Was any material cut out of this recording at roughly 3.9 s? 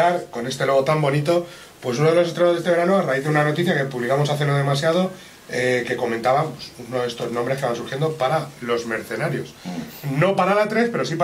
yes; 1 cut; at 3.9 s

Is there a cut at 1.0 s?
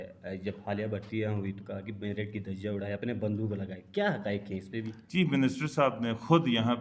no; 1 cut; at 5.0 s

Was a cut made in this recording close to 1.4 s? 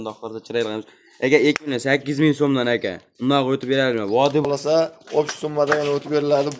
no; 1 cut; at 4.4 s

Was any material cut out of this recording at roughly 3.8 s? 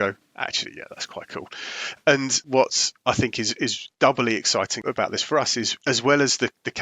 yes; 4 cuts; at 2.4 s, 3.8 s, 4.8 s, 5.7 s

